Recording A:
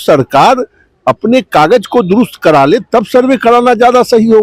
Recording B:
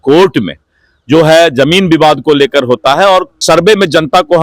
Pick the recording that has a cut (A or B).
B